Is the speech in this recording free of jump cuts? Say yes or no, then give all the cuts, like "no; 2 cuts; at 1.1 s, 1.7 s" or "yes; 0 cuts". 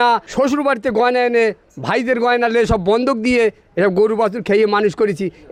yes; 0 cuts